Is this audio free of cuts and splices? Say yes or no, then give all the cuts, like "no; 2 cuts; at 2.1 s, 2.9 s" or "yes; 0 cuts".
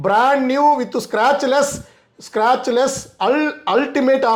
yes; 0 cuts